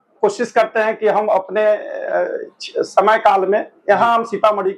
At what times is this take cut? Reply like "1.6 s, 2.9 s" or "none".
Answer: none